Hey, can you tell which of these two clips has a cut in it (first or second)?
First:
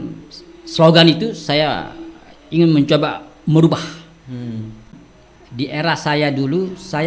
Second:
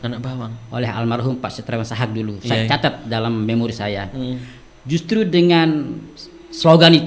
first